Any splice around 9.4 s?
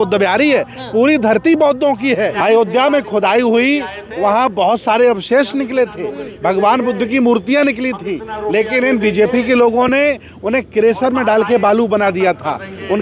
no; 1 cut; at 2.4 s

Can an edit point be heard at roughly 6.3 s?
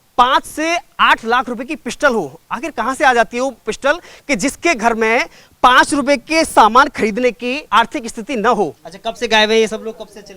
no; 2 cuts; at 7.6 s, 8.8 s

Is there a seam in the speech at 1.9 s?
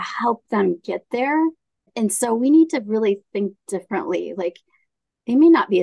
yes; 1 cut; at 1.9 s

